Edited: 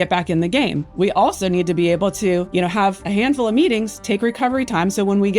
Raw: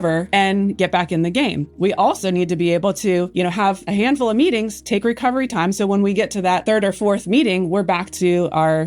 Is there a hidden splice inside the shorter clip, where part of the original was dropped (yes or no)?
no